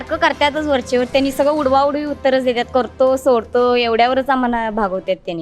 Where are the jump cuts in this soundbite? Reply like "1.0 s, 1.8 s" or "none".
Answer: none